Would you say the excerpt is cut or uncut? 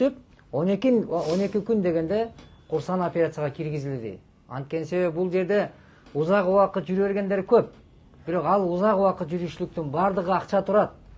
uncut